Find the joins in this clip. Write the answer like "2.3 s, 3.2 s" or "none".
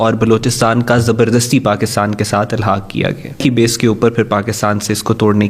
3.4 s